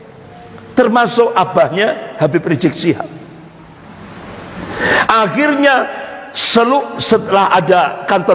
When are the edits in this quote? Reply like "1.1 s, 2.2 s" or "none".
none